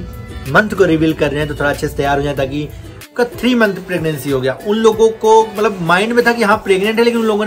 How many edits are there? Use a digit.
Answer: 1